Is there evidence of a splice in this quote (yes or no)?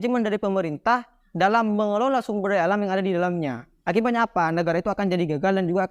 no